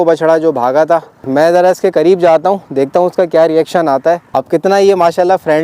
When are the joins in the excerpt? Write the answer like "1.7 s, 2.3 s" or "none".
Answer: 1.2 s, 4.3 s